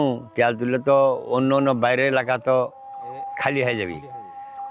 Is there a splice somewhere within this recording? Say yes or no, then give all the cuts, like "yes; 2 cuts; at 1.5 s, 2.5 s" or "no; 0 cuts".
no; 0 cuts